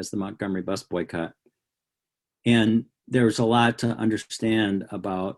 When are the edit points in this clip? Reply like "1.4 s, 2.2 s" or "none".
3.0 s